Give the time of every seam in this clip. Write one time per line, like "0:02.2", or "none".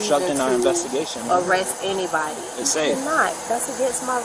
0:02.6

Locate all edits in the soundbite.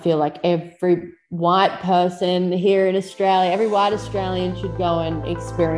none

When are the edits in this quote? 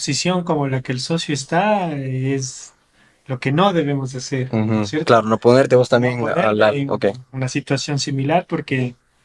none

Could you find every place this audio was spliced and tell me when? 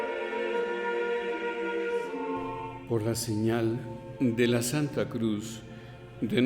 0:02.8

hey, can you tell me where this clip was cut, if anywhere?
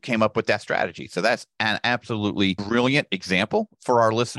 0:02.6

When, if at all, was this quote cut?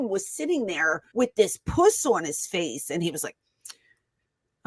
0:01.0

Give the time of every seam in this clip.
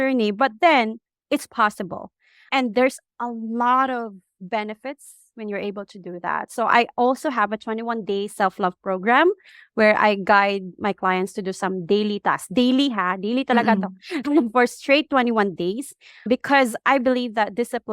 0:01.1
0:03.1
0:04.3

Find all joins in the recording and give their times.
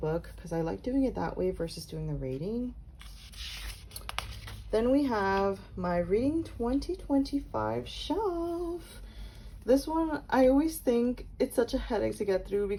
none

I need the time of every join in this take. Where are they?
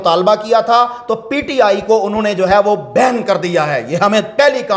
none

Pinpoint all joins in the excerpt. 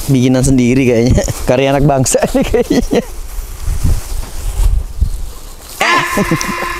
none

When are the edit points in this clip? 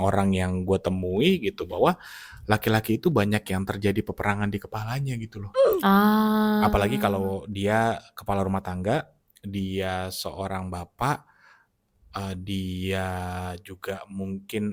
none

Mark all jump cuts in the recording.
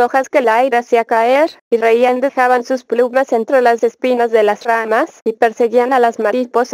0:01.8

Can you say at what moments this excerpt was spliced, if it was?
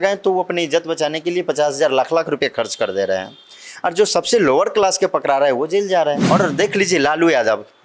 0:06.2

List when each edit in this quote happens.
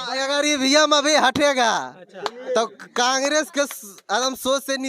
none

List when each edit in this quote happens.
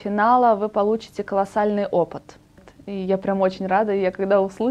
0:02.6

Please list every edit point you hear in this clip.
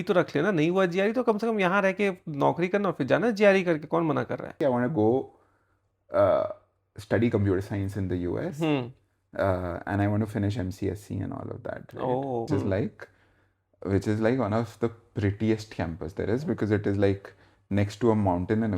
0:04.5
0:12.5

